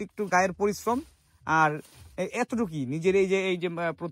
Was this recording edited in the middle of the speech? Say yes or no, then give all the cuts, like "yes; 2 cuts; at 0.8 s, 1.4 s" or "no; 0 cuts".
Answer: no; 0 cuts